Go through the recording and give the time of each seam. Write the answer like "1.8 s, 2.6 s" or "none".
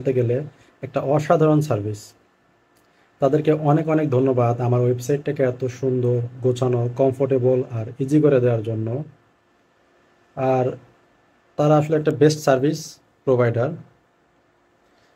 none